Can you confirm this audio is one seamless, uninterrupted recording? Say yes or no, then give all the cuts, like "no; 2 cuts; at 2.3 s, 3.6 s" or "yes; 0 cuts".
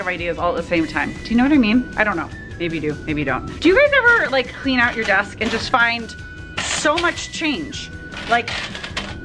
no; 1 cut; at 3.5 s